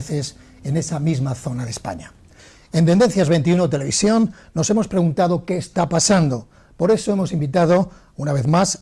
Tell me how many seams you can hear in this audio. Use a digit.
1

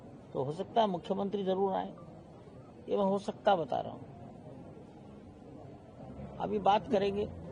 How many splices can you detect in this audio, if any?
0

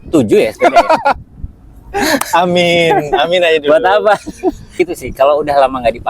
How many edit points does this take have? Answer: 1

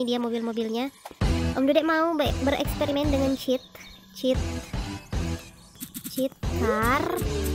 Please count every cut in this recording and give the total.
0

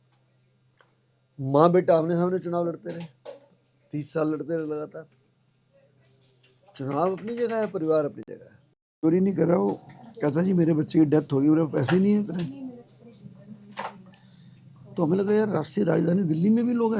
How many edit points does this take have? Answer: 1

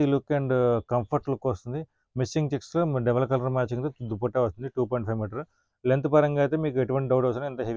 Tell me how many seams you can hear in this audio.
0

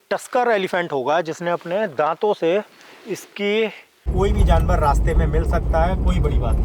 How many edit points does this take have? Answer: 1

